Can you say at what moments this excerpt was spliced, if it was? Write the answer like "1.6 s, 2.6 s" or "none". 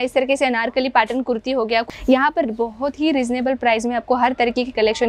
1.8 s

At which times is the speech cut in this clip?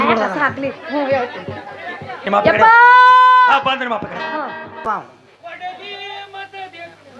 4.8 s

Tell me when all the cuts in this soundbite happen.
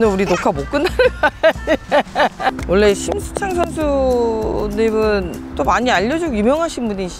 2.6 s

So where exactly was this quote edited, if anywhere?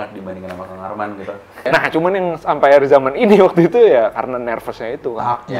1.6 s

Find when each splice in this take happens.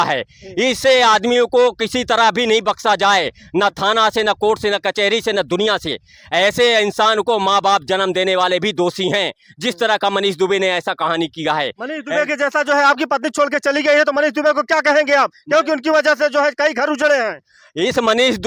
none

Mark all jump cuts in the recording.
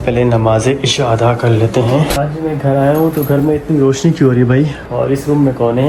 2.1 s

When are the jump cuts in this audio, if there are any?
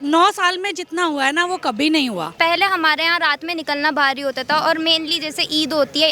2.3 s

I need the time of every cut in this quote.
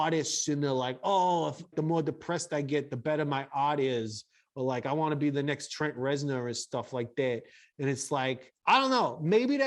1.7 s, 8.5 s

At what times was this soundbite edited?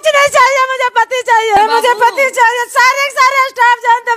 1.6 s

